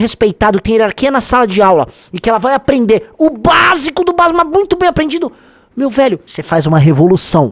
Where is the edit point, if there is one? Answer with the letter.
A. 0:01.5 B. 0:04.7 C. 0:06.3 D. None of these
C